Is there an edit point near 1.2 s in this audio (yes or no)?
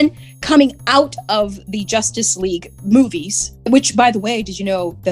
no